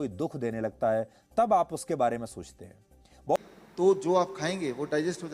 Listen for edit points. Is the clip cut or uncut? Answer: cut